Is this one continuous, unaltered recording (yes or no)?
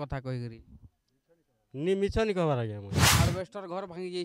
no